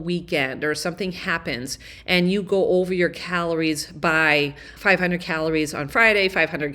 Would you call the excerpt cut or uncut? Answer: uncut